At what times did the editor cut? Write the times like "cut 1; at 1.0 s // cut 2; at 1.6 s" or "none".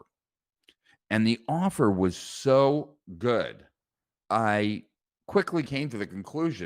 cut 1; at 4.2 s // cut 2; at 5.7 s